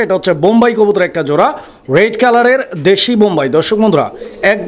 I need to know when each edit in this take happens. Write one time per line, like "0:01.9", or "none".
none

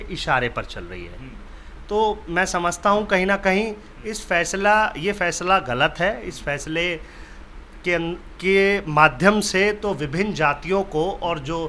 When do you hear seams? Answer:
none

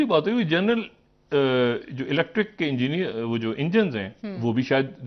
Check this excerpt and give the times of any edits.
none

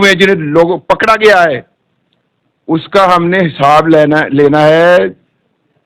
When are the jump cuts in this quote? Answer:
none

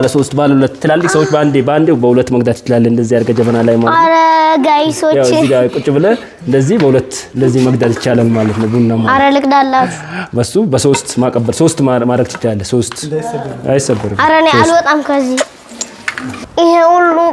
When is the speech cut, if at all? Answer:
0:14.1
0:15.5

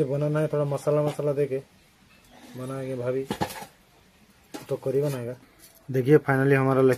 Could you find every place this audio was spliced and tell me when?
0:05.5

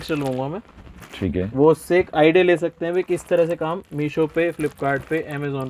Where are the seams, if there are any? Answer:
none

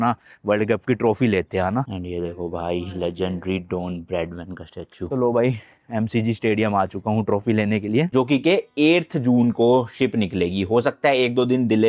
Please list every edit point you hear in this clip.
0:01.9
0:05.1
0:08.1

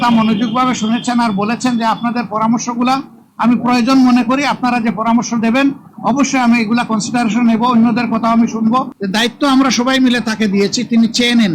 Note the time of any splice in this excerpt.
0:09.0

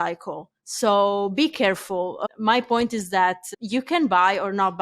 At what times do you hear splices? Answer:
0:02.2
0:03.5

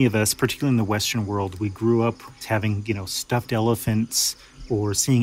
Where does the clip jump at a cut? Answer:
0:02.4

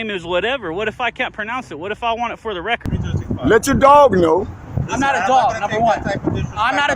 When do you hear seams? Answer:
0:02.9

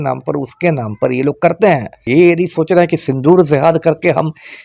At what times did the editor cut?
0:02.1

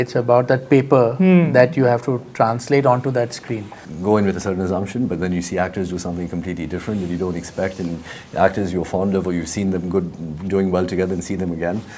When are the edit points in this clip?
0:03.9

